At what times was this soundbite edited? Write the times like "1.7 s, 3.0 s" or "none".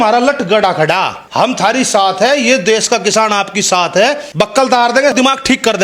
1.2 s, 4.2 s